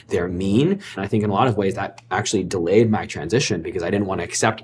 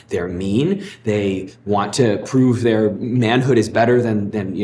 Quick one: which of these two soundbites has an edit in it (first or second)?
first